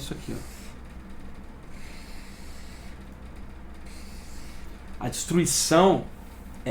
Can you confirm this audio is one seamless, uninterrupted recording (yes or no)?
yes